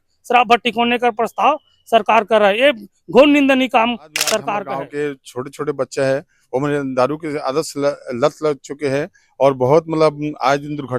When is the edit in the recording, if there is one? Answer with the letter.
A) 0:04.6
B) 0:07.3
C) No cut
A